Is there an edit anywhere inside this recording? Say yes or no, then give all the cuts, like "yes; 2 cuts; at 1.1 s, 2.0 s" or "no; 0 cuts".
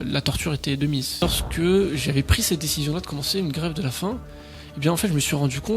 yes; 1 cut; at 1.2 s